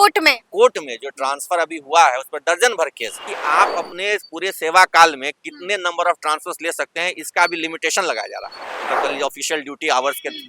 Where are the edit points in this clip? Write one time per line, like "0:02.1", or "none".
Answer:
0:03.3
0:08.7